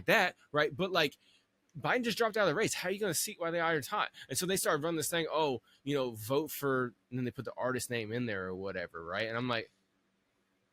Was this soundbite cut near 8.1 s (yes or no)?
no